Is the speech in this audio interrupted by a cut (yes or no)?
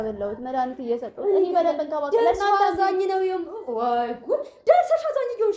no